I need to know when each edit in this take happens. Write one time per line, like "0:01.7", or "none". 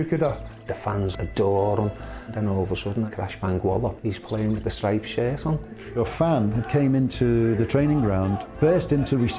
0:00.9
0:02.3
0:04.0
0:05.9
0:08.4